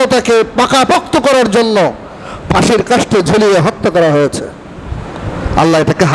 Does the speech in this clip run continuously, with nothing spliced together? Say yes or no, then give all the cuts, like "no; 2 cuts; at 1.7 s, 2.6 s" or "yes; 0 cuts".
yes; 0 cuts